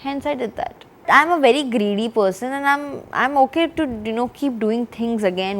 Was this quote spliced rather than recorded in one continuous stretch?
yes; 1 cut; at 1.0 s

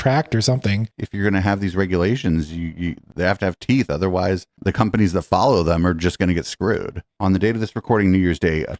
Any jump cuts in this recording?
yes; 2 cuts; at 0.9 s, 7.0 s

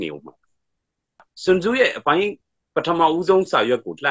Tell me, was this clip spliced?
yes; 1 cut; at 1.0 s

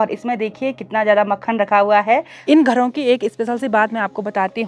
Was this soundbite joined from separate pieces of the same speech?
yes; 1 cut; at 2.3 s

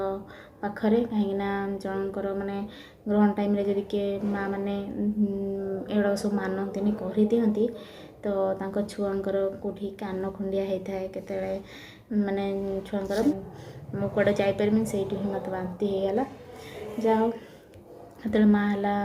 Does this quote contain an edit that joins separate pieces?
yes; 1 cut; at 13.3 s

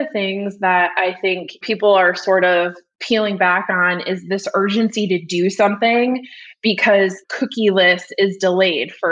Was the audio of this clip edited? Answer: no; 0 cuts

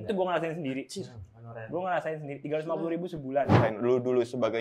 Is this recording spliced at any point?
yes; 1 cut; at 3.6 s

